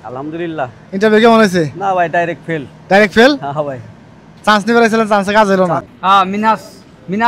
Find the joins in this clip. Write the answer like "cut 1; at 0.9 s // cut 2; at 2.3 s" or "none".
cut 1; at 5.9 s